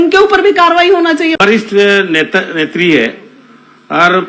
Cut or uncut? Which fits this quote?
cut